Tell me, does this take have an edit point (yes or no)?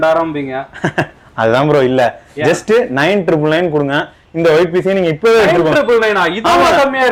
no